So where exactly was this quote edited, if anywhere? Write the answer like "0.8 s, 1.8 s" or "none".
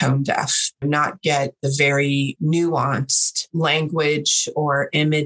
0.8 s, 2.3 s, 3.4 s